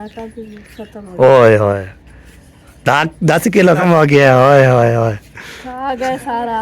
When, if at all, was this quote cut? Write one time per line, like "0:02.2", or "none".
0:03.8